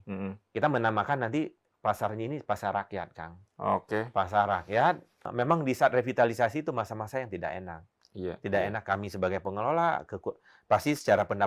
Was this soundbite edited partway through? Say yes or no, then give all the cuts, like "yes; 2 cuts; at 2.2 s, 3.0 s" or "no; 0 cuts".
yes; 1 cut; at 5.3 s